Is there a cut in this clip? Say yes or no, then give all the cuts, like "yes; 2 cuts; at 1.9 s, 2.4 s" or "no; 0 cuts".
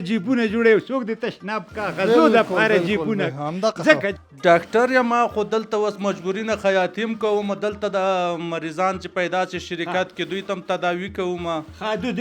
yes; 1 cut; at 4.2 s